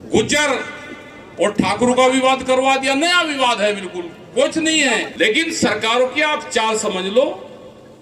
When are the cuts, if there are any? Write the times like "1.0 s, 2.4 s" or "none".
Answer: 5.1 s